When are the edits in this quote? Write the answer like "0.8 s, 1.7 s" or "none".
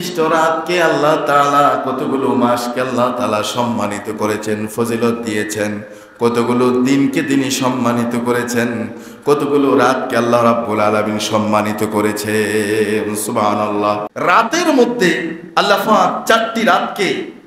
14.1 s